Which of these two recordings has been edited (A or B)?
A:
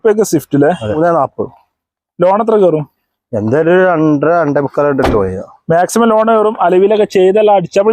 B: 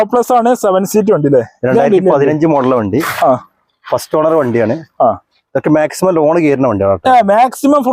A